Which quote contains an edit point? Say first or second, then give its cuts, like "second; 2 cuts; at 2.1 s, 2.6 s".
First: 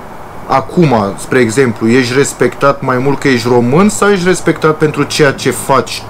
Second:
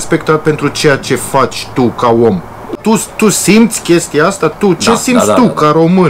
second; 1 cut; at 2.8 s